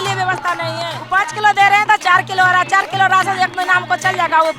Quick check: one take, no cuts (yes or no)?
no